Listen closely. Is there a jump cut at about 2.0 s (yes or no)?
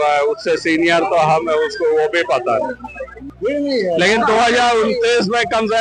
no